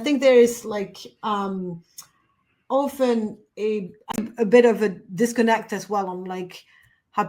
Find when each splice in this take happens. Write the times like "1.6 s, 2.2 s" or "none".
4.1 s